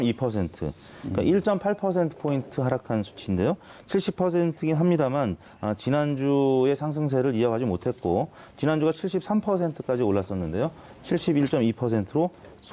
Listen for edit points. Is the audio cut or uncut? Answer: uncut